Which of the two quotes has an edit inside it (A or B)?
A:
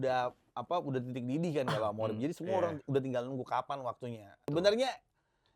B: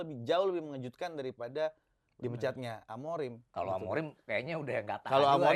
A